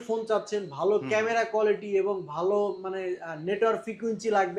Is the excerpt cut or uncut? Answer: uncut